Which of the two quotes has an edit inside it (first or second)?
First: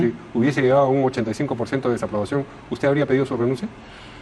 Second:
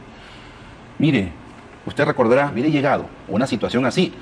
second